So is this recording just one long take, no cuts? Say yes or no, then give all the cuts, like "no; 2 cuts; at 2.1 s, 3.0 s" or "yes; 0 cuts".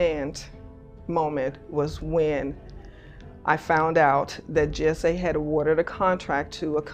yes; 0 cuts